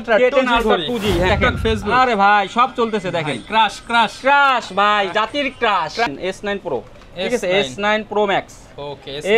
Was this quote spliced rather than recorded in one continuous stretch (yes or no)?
yes